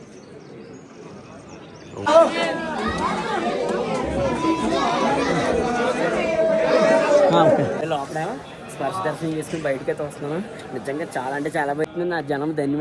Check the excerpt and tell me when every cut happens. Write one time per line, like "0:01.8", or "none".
0:02.1
0:07.8
0:11.8

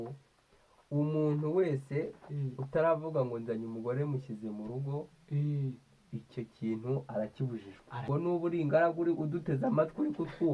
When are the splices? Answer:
0:08.0

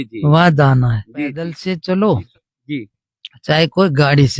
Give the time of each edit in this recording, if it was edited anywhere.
0:01.5

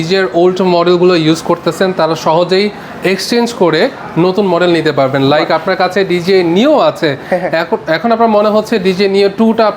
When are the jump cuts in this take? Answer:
none

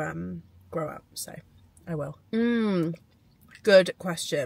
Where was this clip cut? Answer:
none

